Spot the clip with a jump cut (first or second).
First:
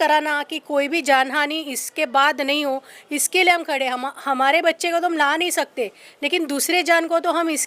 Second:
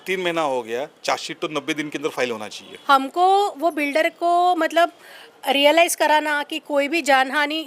second